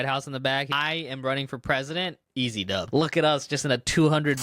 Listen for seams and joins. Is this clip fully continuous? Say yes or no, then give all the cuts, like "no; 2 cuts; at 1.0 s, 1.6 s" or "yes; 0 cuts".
no; 2 cuts; at 0.7 s, 2.8 s